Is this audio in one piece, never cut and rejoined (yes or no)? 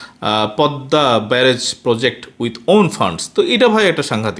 yes